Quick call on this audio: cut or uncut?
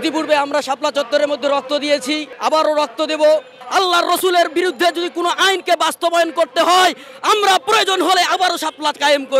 cut